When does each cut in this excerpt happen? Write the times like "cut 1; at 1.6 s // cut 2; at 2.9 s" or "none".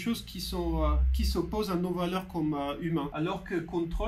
cut 1; at 3.1 s